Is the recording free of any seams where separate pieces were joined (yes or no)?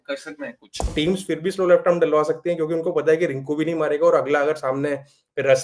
no